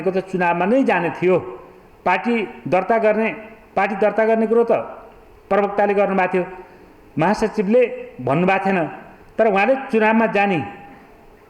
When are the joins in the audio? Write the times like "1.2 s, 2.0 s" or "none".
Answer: none